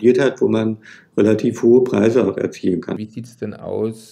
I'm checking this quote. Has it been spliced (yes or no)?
yes